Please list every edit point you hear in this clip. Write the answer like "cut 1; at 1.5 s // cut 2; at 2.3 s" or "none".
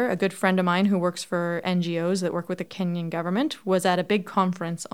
cut 1; at 2.7 s

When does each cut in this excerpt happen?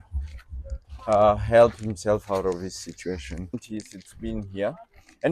cut 1; at 3.5 s

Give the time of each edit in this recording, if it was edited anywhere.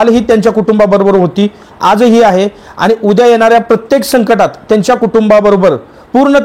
none

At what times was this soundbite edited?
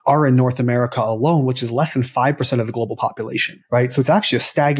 cut 1; at 3.5 s

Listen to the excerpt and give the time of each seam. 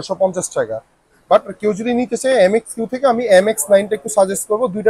none

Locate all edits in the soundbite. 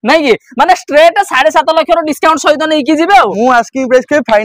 cut 1; at 3.3 s

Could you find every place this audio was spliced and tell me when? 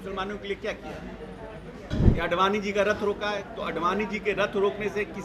cut 1; at 1.9 s

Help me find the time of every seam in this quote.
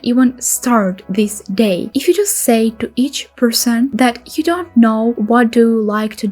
cut 1; at 1.8 s

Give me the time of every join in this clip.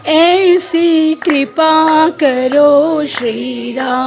none

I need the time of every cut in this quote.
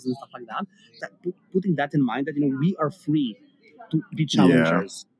cut 1; at 1.0 s

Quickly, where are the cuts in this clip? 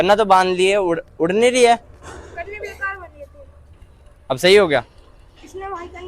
none

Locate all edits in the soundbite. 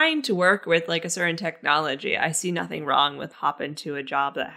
cut 1; at 3.3 s

